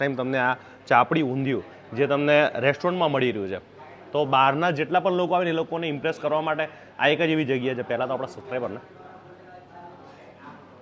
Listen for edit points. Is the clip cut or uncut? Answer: uncut